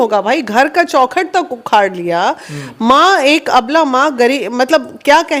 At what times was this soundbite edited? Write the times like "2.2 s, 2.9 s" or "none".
none